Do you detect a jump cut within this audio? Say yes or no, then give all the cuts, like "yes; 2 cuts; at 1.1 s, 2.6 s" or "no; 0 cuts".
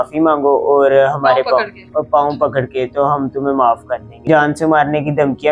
yes; 1 cut; at 4.3 s